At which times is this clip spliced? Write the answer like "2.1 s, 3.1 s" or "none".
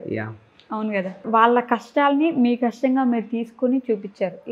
1.2 s